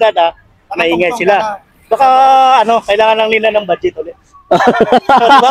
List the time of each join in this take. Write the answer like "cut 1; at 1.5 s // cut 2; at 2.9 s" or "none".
none